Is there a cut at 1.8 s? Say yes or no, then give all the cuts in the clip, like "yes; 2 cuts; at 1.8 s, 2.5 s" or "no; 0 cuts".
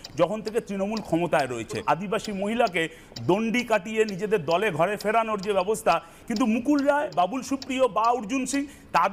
yes; 3 cuts; at 1.8 s, 6.1 s, 7.1 s